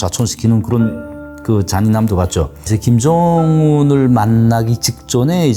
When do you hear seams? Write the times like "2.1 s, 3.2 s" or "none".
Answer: 2.7 s